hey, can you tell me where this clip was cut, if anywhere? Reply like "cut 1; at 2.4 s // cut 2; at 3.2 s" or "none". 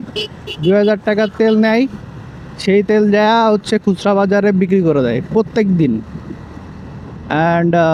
none